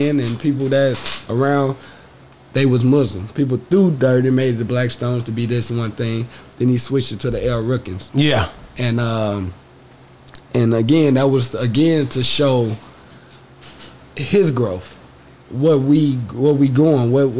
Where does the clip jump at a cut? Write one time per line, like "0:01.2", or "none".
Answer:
none